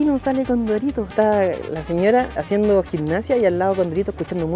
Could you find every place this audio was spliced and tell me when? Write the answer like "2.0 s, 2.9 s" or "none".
1.1 s, 2.4 s